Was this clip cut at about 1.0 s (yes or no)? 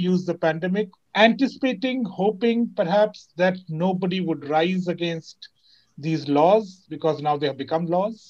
yes